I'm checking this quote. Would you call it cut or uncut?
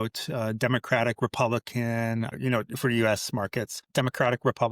cut